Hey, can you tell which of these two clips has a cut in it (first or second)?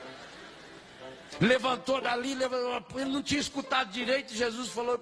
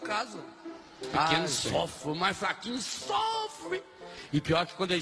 second